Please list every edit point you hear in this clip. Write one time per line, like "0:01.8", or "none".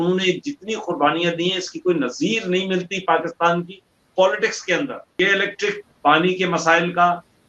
0:05.0